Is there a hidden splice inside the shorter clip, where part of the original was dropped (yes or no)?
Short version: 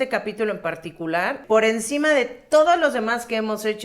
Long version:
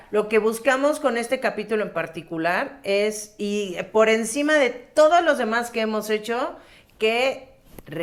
yes